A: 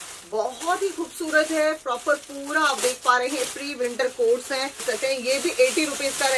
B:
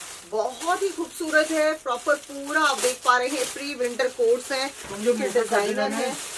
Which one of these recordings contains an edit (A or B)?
A